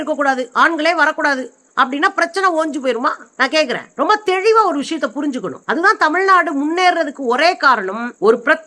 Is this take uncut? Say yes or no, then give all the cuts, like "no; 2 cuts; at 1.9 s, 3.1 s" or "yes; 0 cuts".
yes; 0 cuts